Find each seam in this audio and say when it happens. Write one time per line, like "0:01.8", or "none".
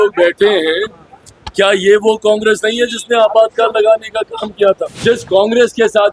0:04.9